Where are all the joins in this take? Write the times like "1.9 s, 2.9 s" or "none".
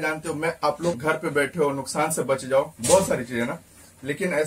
1.0 s